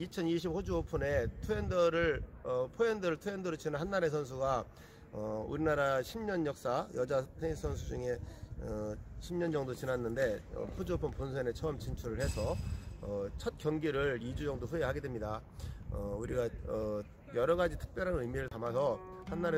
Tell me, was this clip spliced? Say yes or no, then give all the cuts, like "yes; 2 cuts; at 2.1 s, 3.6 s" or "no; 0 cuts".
no; 0 cuts